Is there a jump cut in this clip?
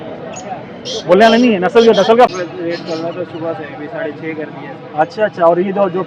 yes; 1 cut; at 2.3 s

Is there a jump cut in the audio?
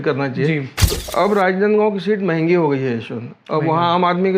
yes; 1 cut; at 1.0 s

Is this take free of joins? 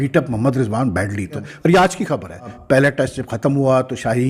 no; 2 cuts; at 1.4 s, 2.6 s

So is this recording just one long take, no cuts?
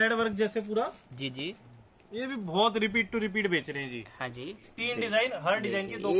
no; 1 cut; at 4.7 s

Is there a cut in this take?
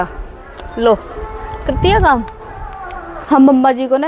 yes; 1 cut; at 3.2 s

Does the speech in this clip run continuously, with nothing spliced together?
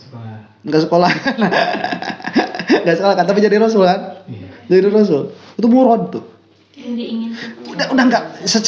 yes; 0 cuts

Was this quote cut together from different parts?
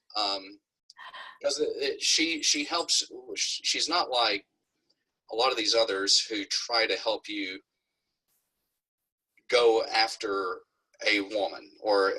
no; 0 cuts

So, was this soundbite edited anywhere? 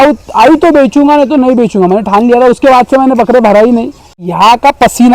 yes; 1 cut; at 4.2 s

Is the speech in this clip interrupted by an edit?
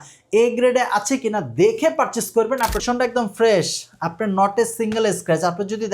yes; 1 cut; at 2.8 s

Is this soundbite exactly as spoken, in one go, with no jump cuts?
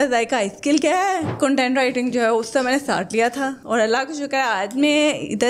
no; 1 cut; at 1.3 s

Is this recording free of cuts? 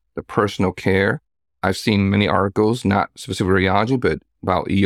yes; 0 cuts

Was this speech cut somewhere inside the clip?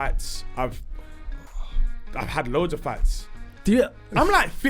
no; 0 cuts

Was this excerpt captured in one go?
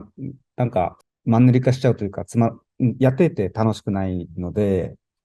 no; 1 cut; at 1.1 s

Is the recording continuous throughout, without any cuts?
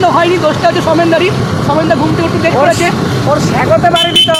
yes; 0 cuts

